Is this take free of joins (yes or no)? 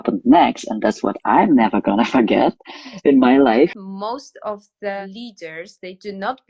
no